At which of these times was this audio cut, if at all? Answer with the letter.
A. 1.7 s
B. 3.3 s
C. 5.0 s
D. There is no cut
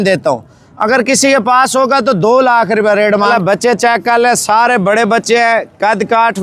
B